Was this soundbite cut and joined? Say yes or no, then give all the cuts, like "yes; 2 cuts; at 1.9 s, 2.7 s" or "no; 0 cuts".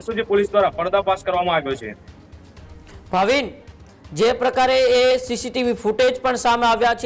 no; 0 cuts